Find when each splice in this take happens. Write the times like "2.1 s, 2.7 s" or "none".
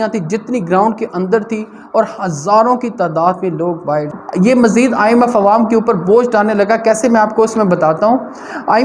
4.2 s

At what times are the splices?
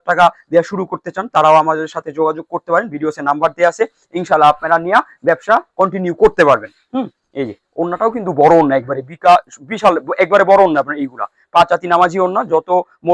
none

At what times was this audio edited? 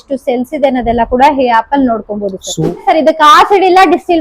2.8 s

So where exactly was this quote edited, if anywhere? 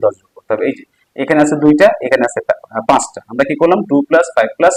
none

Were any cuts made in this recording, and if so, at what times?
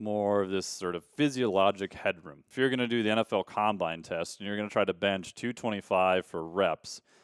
2.4 s

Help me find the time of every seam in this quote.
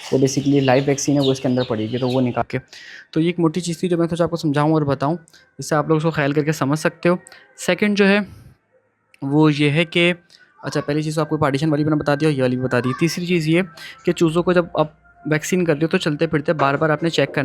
2.4 s

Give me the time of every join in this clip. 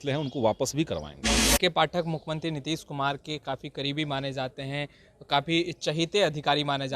1.4 s

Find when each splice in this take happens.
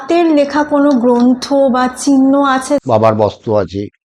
2.8 s

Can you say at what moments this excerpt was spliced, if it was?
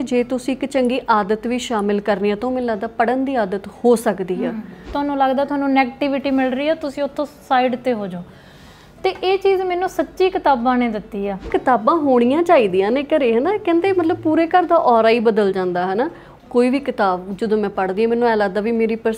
4.8 s, 11.5 s, 16.2 s

